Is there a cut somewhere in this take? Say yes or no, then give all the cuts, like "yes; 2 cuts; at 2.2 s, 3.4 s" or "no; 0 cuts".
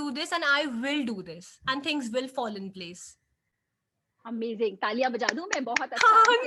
no; 0 cuts